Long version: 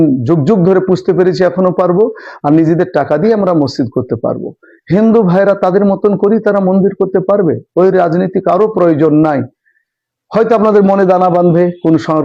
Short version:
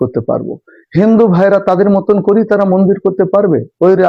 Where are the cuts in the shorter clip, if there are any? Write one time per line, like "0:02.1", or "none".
none